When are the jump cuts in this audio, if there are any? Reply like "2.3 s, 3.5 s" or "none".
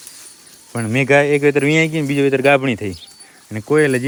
none